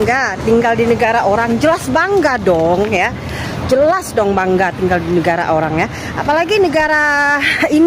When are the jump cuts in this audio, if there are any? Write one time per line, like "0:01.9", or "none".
none